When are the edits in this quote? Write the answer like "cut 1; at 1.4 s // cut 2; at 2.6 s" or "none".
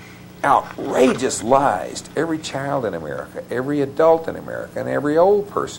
none

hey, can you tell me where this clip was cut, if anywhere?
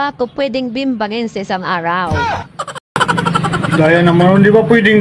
none

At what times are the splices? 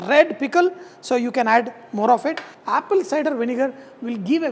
cut 1; at 2.5 s

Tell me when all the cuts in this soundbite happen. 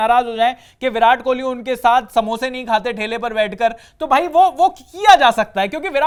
none

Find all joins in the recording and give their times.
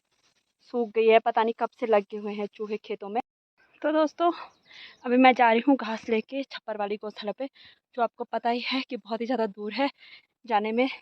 cut 1; at 3.2 s

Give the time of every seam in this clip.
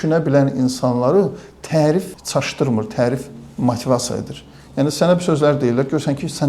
cut 1; at 2.2 s

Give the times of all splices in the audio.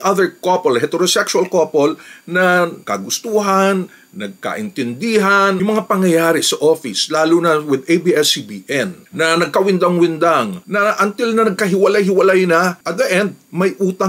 cut 1; at 5.6 s // cut 2; at 10.5 s

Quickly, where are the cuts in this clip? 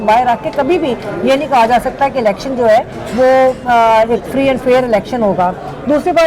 none

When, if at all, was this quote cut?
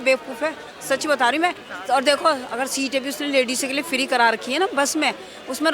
cut 1; at 1.7 s

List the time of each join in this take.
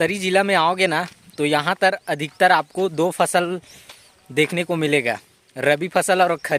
none

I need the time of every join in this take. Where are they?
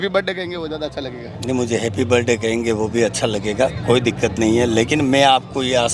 none

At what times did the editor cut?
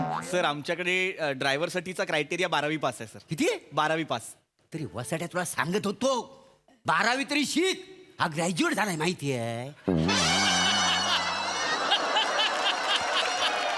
none

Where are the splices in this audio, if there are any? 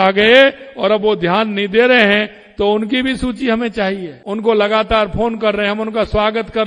cut 1; at 4.1 s

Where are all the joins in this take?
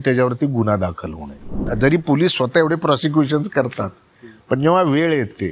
cut 1; at 1.6 s

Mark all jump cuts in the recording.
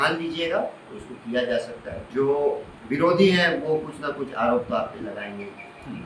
cut 1; at 2.1 s // cut 2; at 2.7 s

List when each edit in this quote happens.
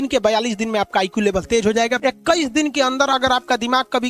cut 1; at 2.0 s

